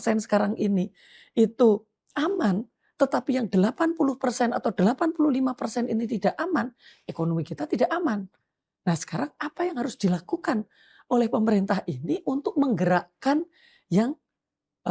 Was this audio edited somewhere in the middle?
no; 0 cuts

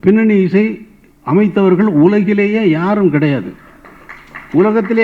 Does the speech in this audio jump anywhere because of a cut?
no; 0 cuts

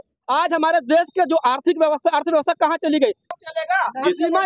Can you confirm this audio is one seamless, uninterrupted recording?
no; 1 cut; at 3.2 s

